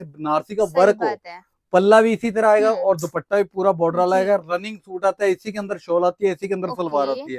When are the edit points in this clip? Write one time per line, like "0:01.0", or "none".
none